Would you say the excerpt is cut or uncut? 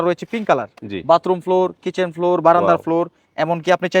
uncut